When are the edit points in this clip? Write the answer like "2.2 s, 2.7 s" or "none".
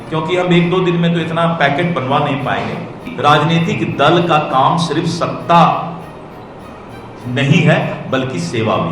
3.0 s